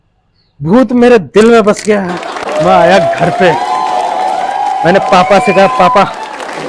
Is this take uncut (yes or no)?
no